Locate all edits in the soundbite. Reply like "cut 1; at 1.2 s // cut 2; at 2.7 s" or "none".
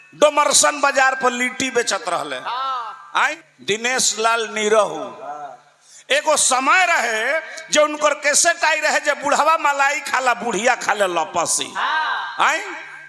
cut 1; at 3.5 s